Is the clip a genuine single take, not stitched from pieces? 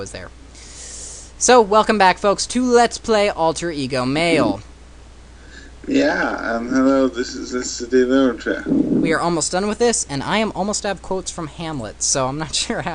no; 1 cut; at 8.1 s

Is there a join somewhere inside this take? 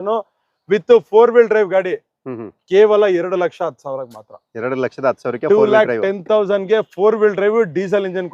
no; 0 cuts

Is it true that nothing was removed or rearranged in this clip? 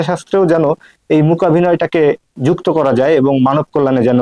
yes; 0 cuts

